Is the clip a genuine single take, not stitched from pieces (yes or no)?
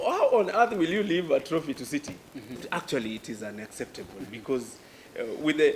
no